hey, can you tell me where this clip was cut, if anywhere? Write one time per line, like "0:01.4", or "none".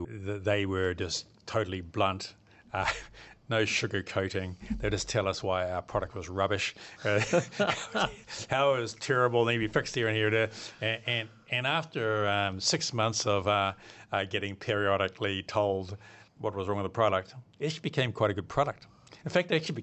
none